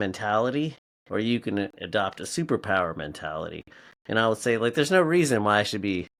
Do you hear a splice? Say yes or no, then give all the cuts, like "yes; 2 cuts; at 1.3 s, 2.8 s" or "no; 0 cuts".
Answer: no; 0 cuts